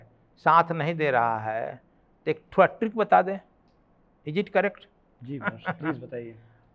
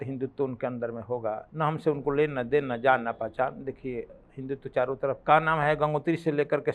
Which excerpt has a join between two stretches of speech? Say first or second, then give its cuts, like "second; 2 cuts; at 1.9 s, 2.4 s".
second; 2 cuts; at 1.5 s, 5.2 s